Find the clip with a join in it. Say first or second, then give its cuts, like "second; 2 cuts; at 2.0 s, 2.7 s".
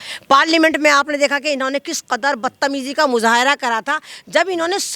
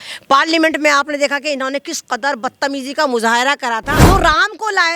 second; 1 cut; at 3.9 s